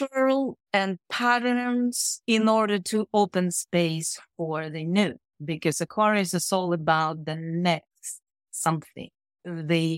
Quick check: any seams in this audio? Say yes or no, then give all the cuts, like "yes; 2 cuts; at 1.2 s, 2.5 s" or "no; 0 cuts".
yes; 1 cut; at 2.1 s